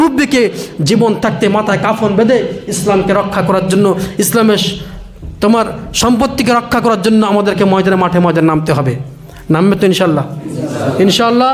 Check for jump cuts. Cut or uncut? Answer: uncut